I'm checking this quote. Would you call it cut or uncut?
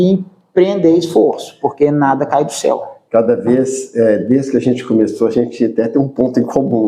uncut